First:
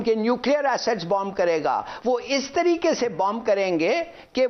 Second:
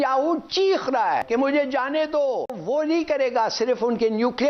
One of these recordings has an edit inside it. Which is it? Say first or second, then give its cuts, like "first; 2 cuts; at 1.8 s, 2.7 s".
second; 2 cuts; at 1.2 s, 2.6 s